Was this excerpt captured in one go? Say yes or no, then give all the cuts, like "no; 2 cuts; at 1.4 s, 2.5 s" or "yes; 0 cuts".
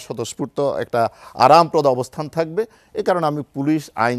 yes; 0 cuts